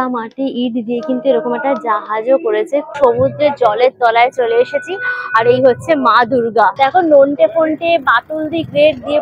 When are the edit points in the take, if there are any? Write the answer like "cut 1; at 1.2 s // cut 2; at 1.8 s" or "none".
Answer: cut 1; at 2.9 s // cut 2; at 6.7 s